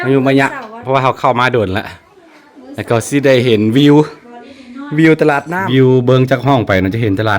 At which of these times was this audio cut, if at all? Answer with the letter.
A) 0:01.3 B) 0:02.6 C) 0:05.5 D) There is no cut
C